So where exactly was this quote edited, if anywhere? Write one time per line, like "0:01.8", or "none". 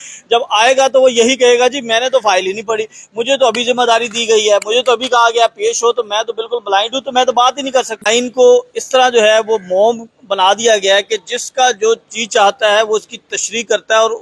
0:08.0